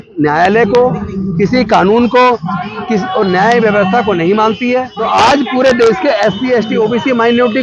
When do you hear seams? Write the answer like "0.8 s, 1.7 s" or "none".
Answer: 4.9 s